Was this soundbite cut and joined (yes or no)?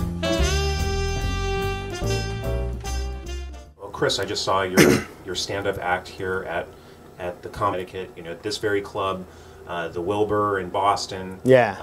no